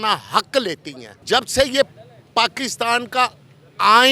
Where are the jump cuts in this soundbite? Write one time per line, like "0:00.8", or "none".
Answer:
0:01.2